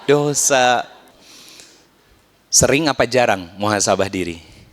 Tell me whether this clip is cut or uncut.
cut